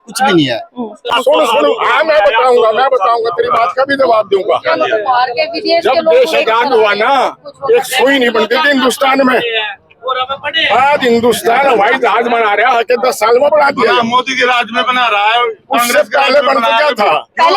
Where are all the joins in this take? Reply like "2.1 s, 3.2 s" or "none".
1.1 s